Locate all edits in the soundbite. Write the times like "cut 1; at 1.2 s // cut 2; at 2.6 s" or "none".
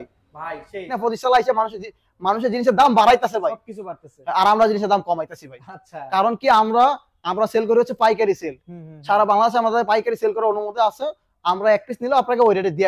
cut 1; at 1.0 s